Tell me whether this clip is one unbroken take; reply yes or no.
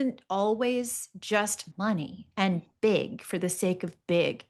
no